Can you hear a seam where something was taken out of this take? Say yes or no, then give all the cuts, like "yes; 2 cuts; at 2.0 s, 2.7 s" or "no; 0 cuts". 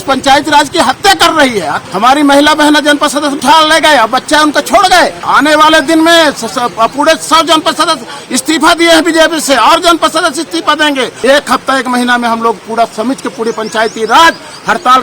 yes; 4 cuts; at 1.8 s, 3.4 s, 5.3 s, 11.1 s